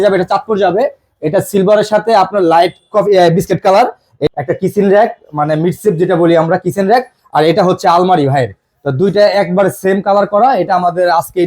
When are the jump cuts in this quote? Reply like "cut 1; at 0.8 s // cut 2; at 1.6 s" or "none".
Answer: cut 1; at 4.3 s